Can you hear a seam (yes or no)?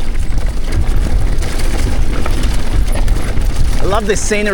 no